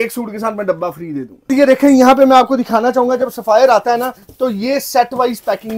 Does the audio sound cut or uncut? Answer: cut